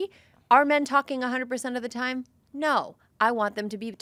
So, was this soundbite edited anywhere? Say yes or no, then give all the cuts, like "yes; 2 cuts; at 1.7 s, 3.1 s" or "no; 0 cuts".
no; 0 cuts